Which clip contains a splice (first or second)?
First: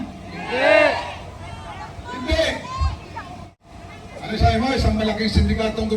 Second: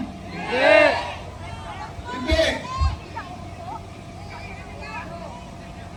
first